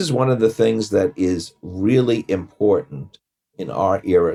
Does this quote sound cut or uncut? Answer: uncut